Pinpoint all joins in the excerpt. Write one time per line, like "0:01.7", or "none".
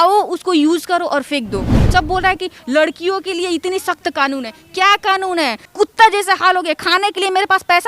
0:01.9
0:05.7

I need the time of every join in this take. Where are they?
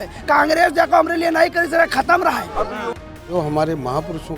0:02.9

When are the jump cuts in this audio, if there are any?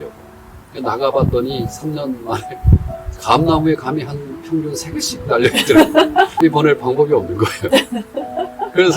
0:06.4

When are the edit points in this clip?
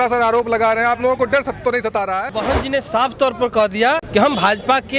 0:02.3
0:04.0

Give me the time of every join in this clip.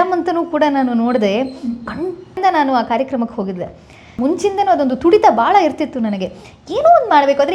0:02.3
0:04.1

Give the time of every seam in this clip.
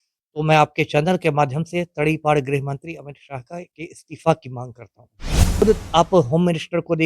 0:05.4

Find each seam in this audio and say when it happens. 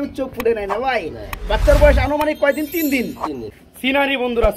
0:03.5

